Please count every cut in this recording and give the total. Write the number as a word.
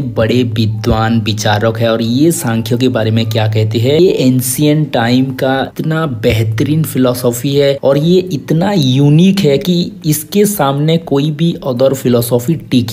one